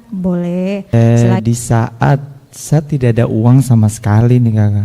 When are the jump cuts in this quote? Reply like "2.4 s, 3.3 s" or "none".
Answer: 1.1 s